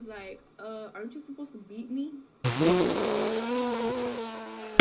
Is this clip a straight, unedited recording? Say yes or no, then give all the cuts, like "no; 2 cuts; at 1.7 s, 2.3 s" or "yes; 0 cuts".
no; 1 cut; at 2.4 s